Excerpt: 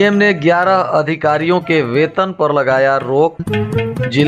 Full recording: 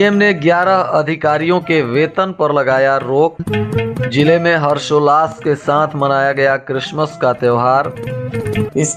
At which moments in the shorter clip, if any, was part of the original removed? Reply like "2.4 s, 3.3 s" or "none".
none